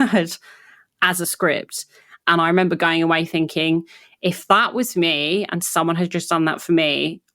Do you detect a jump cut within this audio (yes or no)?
yes